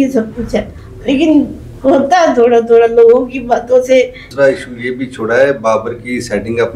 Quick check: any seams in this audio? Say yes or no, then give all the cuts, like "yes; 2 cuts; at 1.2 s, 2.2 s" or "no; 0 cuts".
yes; 1 cut; at 4.2 s